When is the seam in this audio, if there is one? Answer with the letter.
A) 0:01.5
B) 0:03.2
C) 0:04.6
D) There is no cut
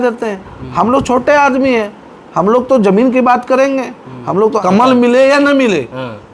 C